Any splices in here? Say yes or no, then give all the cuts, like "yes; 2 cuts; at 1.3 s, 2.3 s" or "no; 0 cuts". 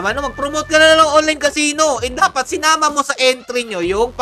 no; 0 cuts